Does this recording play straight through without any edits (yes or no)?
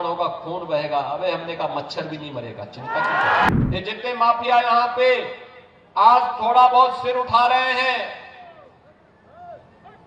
no